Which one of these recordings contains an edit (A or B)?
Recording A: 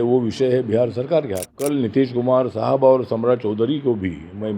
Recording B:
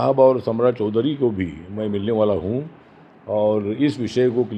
A